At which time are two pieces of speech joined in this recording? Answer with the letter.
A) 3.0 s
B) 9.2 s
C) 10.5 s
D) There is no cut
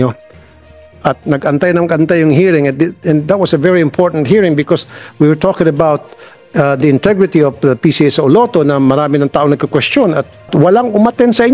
C